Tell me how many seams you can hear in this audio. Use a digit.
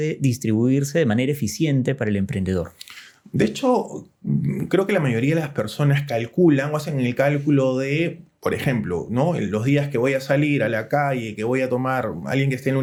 0